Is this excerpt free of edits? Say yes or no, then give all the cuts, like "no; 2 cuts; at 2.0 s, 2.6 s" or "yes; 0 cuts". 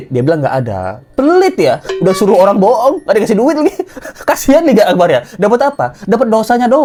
yes; 0 cuts